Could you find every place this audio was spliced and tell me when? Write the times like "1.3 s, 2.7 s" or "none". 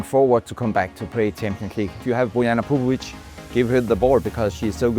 2.0 s